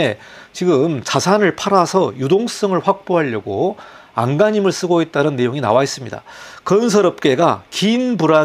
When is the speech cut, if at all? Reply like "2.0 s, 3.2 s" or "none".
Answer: none